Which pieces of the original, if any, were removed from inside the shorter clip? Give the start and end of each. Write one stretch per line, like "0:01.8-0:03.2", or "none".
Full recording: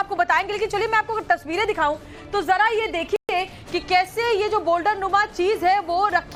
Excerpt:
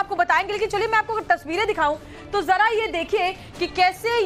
0:03.2-0:03.3

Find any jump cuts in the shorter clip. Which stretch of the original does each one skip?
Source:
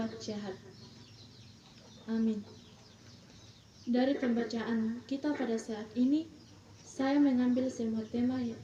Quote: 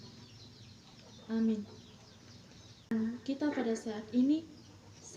0:03.7-0:04.7

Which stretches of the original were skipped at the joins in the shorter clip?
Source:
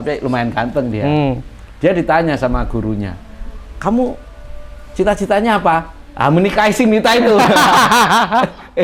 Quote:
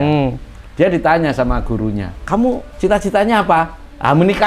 0:03.2-0:03.7
0:04.2-0:04.8

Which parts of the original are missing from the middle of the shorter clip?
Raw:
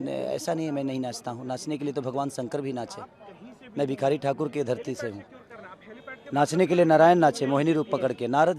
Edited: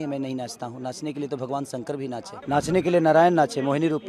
0:03.0-0:06.2

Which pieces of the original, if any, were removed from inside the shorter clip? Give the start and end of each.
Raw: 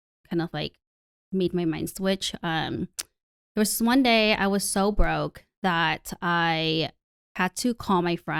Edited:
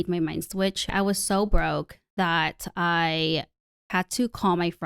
0:02.4-0:04.4

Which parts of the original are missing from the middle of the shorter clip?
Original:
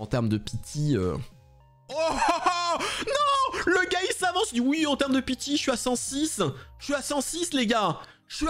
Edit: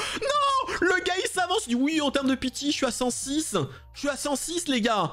none

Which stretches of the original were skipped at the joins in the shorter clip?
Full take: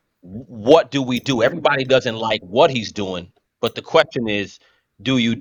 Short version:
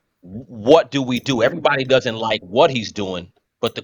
none

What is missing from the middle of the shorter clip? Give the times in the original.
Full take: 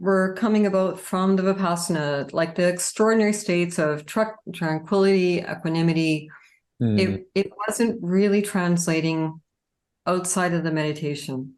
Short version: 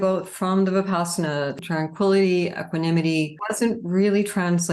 0:02.3-0:04.5
0:06.3-0:07.6

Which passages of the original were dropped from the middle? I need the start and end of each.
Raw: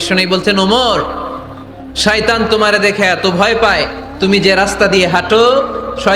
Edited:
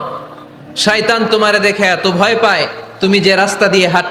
none

